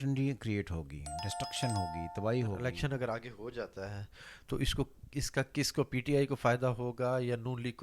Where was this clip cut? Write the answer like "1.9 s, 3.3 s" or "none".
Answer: 2.6 s